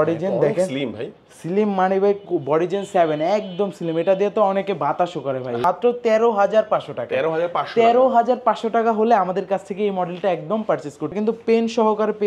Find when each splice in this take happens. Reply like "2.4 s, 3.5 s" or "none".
5.6 s, 11.1 s